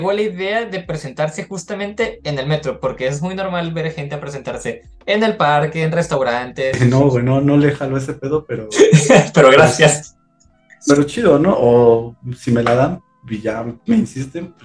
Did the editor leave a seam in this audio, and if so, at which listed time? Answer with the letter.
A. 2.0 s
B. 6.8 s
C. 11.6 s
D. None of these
B